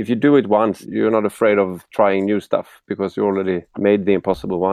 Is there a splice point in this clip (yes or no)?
yes